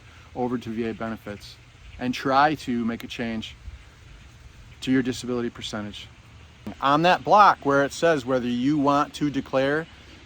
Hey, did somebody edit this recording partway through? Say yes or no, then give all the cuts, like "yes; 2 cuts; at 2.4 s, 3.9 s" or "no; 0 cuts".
yes; 1 cut; at 6.7 s